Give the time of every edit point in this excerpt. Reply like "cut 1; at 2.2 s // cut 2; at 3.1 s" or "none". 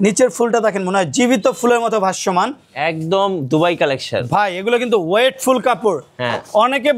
cut 1; at 2.7 s

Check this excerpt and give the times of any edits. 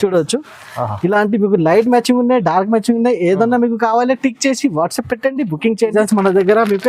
cut 1; at 5.9 s

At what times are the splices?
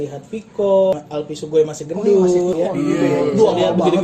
cut 1; at 0.9 s // cut 2; at 2.5 s

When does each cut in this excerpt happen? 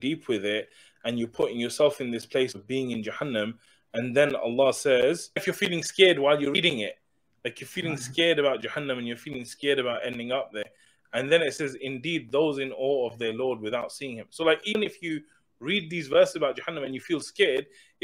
cut 1; at 5.4 s

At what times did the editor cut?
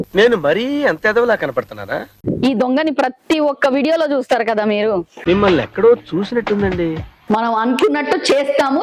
cut 1; at 2.2 s // cut 2; at 7.2 s

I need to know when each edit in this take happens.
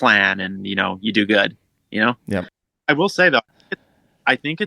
cut 1; at 2.5 s

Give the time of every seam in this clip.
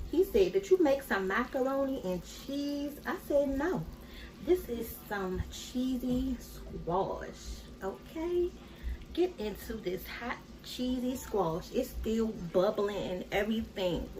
none

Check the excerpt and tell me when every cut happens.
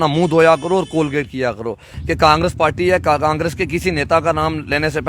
cut 1; at 1.9 s

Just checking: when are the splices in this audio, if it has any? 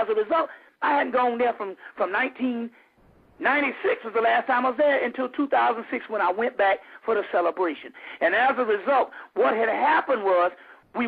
none

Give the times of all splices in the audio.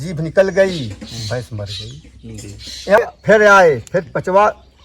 cut 1; at 3.0 s

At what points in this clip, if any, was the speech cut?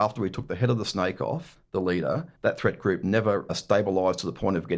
cut 1; at 1.5 s // cut 2; at 2.3 s // cut 3; at 3.5 s

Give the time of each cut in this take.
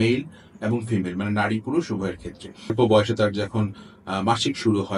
cut 1; at 2.7 s

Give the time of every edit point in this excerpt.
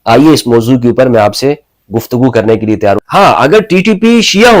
cut 1; at 3.0 s

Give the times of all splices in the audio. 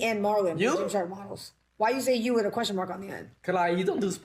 none

